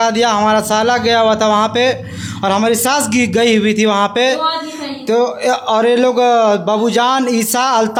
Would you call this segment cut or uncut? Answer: uncut